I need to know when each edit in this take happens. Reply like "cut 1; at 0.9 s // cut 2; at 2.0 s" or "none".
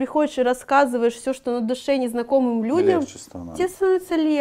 none